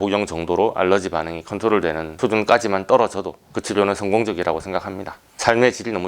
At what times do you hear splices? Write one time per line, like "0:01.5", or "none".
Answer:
0:05.2